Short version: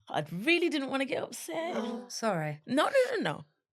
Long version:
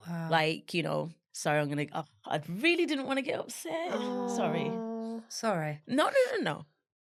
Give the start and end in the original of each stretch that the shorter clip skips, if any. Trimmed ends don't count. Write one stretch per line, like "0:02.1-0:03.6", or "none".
0:04.1-0:05.1